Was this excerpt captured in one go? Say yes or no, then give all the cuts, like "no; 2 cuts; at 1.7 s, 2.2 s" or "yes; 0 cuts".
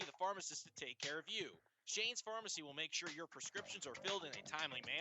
yes; 0 cuts